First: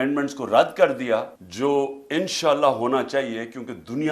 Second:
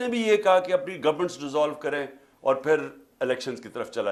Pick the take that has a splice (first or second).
first